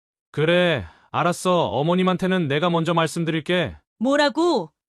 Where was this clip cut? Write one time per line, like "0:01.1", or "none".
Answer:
0:03.8